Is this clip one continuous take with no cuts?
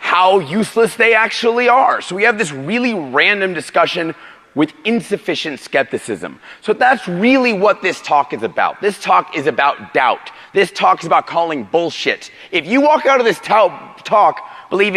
no; 1 cut; at 3.6 s

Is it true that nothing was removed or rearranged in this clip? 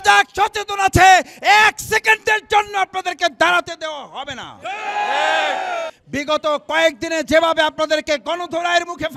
no; 1 cut; at 6.0 s

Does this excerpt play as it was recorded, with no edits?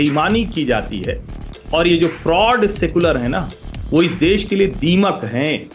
yes; 0 cuts

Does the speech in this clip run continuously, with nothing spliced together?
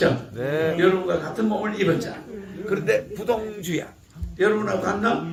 yes; 0 cuts

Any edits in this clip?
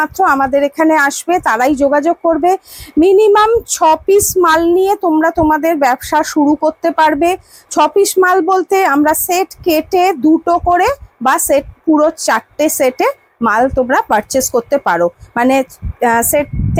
no; 0 cuts

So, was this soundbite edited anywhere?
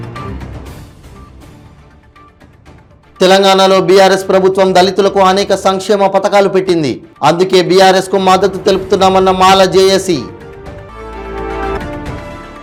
no; 0 cuts

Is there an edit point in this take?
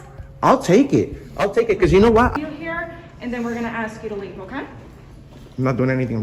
yes; 1 cut; at 2.3 s

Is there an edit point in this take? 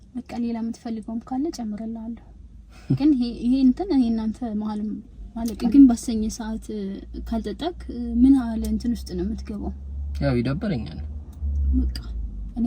yes; 1 cut; at 5.6 s

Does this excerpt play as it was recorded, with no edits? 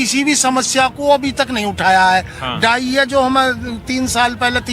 yes; 0 cuts

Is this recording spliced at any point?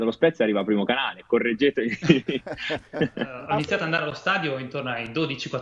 yes; 1 cut; at 3.4 s

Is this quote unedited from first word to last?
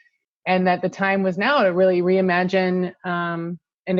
yes; 0 cuts

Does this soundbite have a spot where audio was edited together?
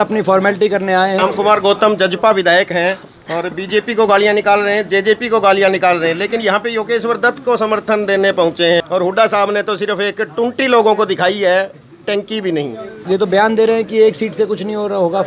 yes; 3 cuts; at 1.2 s, 8.8 s, 13.0 s

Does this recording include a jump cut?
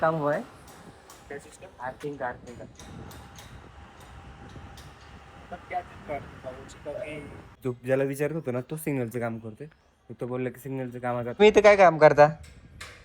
yes; 2 cuts; at 7.5 s, 11.4 s

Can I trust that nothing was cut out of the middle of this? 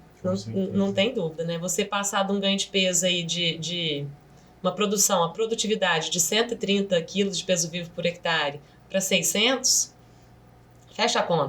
yes; 0 cuts

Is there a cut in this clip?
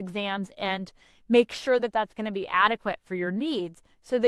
no; 0 cuts

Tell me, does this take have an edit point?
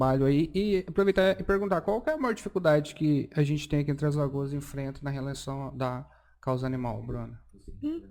no; 0 cuts

